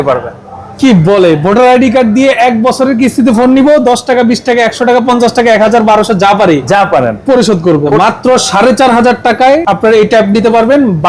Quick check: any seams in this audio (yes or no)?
yes